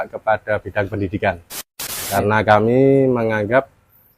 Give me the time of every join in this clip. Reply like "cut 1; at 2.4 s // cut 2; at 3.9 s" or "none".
cut 1; at 1.8 s